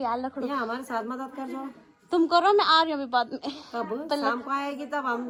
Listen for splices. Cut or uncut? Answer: uncut